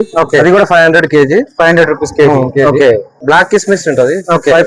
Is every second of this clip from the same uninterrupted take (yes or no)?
yes